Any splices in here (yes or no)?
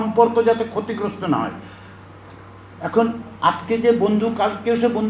no